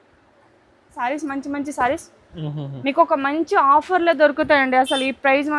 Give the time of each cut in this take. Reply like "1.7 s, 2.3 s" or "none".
1.0 s